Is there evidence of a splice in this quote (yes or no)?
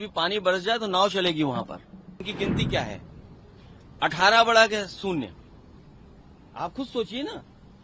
yes